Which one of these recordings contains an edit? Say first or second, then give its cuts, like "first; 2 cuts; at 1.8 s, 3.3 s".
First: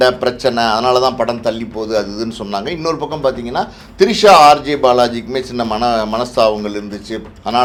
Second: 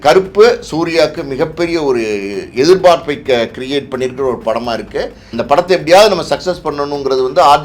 second; 1 cut; at 5.2 s